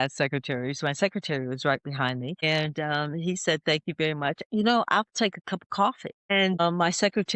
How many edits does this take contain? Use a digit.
2